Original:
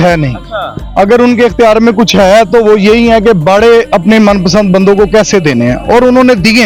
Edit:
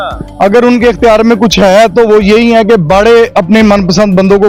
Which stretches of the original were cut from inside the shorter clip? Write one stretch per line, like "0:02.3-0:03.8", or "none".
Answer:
none